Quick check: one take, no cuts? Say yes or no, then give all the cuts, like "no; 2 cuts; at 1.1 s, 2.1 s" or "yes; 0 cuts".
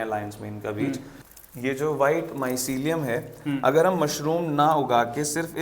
no; 1 cut; at 1.2 s